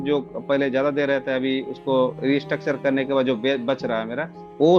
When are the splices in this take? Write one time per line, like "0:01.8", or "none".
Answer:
none